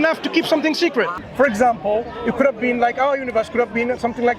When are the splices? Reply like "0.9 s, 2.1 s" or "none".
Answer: 1.1 s

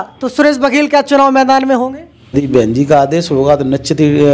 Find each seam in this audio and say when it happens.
2.3 s

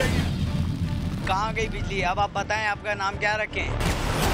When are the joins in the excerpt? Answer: none

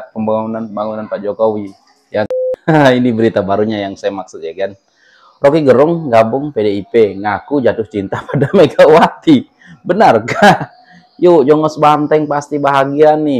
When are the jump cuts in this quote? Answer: 2.3 s

